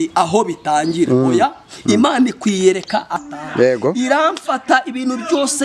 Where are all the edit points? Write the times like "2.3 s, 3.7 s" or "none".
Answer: 3.2 s

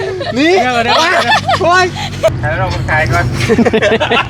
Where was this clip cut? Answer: 2.3 s

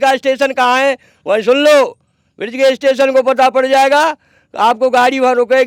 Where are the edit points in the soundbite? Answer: none

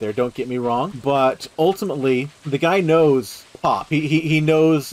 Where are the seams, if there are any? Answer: 0.9 s, 2.4 s, 3.4 s

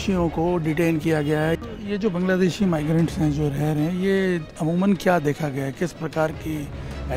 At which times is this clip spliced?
1.6 s

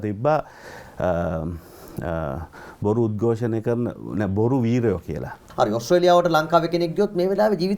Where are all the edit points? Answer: 5.4 s

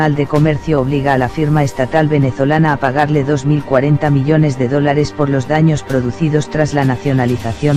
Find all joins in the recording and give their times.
none

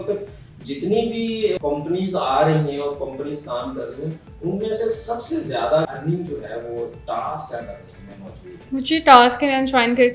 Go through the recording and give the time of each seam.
1.6 s, 5.9 s, 8.5 s

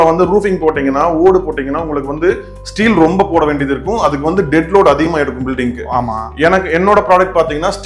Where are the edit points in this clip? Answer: none

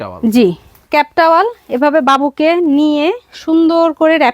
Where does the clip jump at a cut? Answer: none

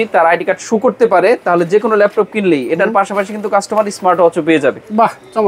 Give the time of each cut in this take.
none

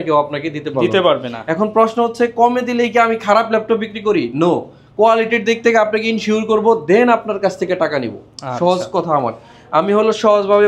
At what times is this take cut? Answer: none

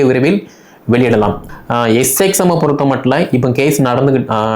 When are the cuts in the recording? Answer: 1.5 s

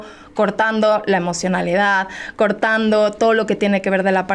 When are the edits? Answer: none

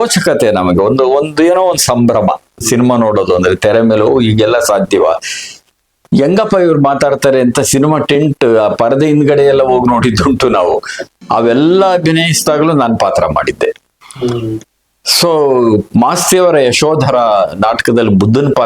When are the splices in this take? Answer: 11.1 s

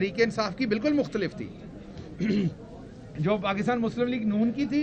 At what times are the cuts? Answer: none

